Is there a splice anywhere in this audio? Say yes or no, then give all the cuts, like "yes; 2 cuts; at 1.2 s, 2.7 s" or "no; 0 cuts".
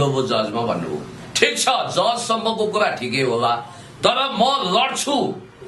no; 0 cuts